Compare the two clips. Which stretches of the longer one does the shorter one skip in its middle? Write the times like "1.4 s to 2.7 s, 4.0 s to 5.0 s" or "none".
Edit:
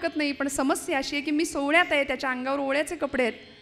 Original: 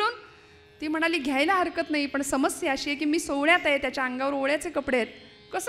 none